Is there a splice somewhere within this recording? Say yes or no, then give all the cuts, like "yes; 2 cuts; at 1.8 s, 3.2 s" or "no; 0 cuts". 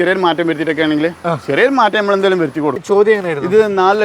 yes; 1 cut; at 2.8 s